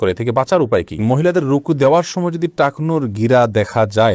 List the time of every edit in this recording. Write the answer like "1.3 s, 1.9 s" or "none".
1.0 s